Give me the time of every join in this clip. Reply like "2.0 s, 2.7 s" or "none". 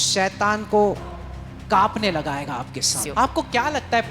2.9 s